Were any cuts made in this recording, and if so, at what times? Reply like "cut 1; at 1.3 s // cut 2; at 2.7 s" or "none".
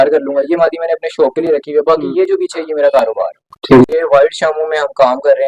cut 1; at 3.9 s